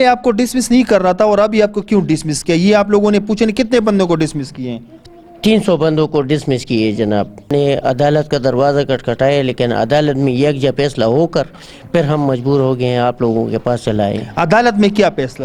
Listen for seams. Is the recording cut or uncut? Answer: uncut